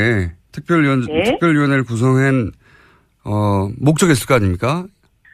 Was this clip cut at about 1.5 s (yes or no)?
no